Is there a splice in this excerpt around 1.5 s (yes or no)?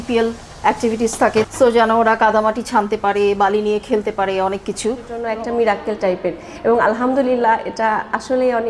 yes